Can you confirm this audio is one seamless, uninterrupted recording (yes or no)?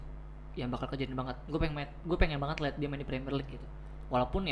yes